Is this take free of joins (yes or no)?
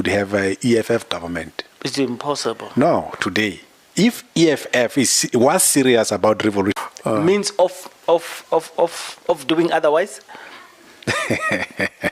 no